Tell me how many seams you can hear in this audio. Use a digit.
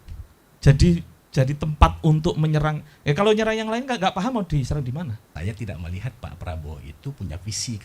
1